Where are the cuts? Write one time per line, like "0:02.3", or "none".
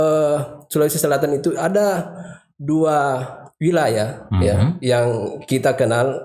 none